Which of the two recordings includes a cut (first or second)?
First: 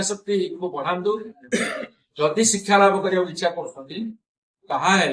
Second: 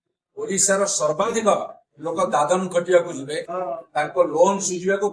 first